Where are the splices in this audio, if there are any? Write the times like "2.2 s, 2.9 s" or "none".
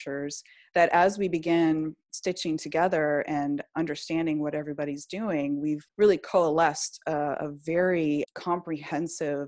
5.9 s, 8.3 s

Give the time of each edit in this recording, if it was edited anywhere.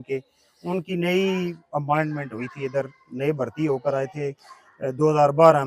none

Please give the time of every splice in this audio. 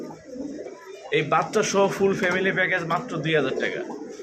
none

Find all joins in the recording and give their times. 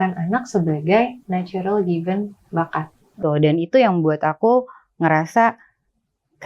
3.1 s

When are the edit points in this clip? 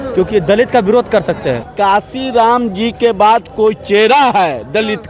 1.7 s

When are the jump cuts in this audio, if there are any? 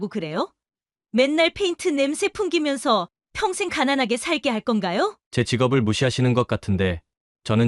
none

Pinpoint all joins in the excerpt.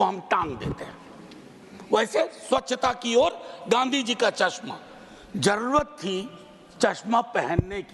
none

